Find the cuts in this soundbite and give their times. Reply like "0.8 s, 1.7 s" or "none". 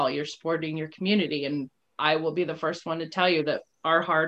1.8 s